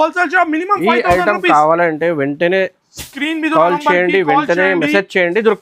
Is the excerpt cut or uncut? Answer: uncut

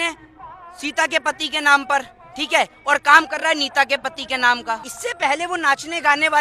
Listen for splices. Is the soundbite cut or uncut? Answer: cut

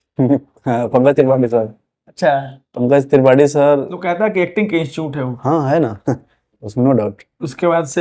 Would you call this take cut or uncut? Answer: cut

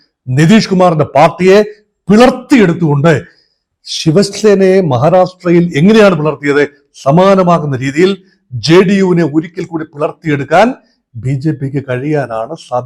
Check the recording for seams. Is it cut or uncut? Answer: uncut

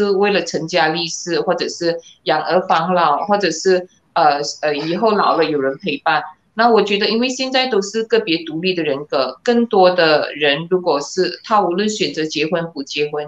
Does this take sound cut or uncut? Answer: uncut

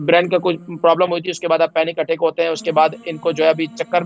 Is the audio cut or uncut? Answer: uncut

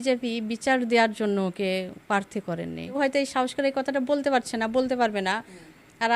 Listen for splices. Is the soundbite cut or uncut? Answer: cut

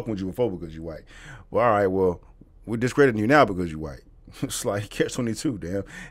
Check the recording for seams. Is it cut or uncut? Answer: uncut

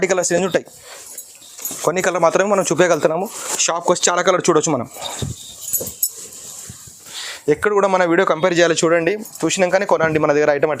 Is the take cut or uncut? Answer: cut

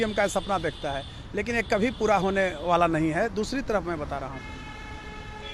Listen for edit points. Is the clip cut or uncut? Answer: uncut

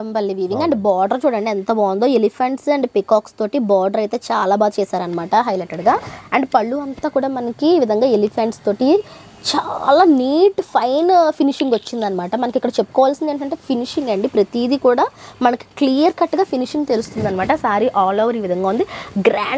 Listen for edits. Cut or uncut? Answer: uncut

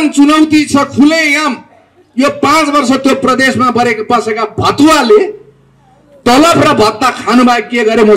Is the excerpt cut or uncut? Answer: uncut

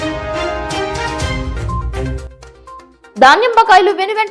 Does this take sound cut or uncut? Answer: cut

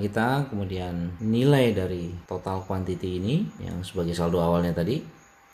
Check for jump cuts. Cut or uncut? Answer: cut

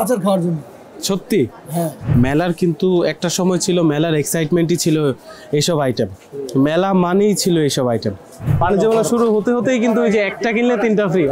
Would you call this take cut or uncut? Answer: cut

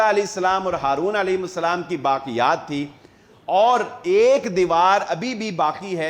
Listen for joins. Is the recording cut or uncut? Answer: uncut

